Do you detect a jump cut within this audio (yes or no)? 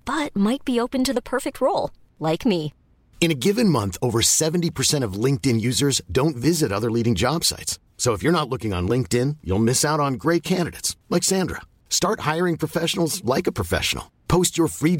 no